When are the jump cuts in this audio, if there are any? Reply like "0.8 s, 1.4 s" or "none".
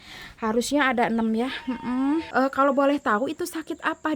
2.3 s

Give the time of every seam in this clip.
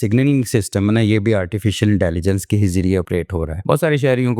3.3 s

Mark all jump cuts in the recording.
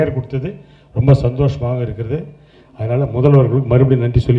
none

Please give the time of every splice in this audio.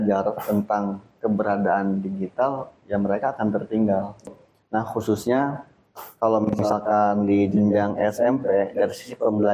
4.3 s

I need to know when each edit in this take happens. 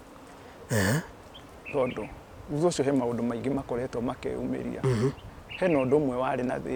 none

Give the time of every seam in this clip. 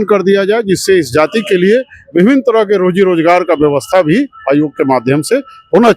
none

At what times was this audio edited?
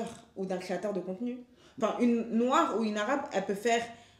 1.8 s

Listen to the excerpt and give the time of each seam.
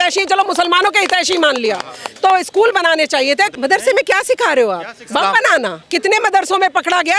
3.5 s, 5.8 s

